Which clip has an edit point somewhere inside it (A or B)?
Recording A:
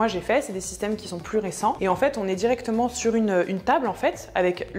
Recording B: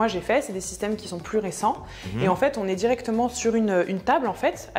A